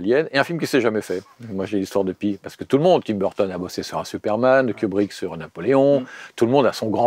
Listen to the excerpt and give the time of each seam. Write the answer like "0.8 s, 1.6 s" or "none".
none